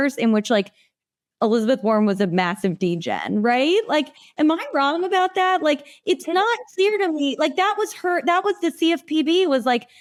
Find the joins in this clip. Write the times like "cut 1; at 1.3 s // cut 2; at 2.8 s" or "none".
none